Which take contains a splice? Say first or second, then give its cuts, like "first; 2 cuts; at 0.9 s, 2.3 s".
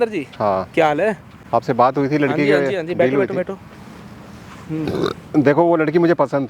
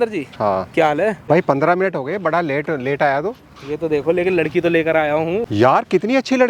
second; 2 cuts; at 1.2 s, 5.5 s